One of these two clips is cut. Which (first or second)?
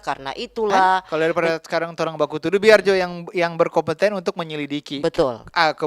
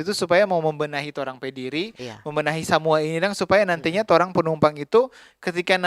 first